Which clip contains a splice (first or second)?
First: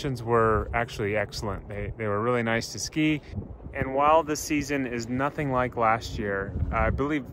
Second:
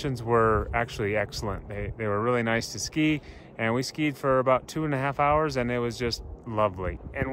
first